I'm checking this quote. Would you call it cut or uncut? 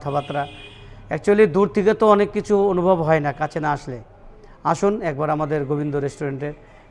uncut